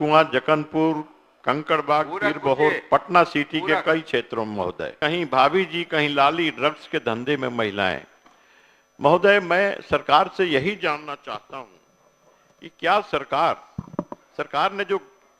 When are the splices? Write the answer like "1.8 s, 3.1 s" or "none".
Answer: 4.9 s